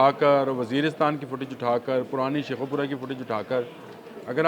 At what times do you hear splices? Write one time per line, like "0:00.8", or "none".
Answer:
none